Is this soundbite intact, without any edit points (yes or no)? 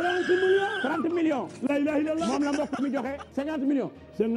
no